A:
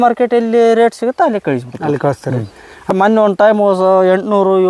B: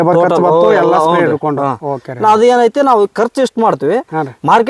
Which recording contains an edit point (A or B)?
A